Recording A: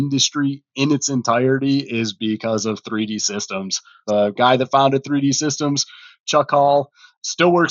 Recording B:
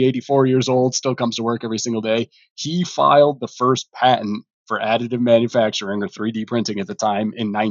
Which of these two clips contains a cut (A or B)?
A